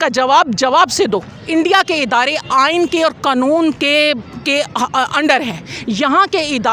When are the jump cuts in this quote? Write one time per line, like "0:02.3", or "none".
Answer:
0:01.4